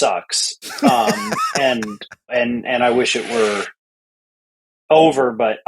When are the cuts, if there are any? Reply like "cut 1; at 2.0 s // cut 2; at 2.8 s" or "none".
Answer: cut 1; at 2.3 s